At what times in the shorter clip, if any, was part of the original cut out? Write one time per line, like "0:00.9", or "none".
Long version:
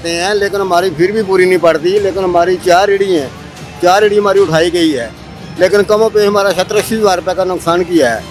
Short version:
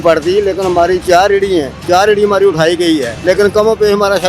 0:01.7
0:03.1